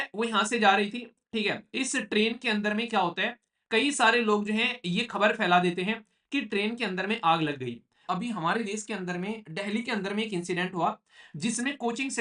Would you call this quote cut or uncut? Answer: cut